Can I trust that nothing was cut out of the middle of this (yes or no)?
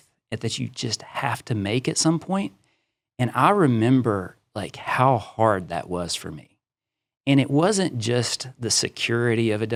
yes